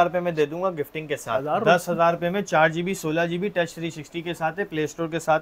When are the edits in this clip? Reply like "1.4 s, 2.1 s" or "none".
1.3 s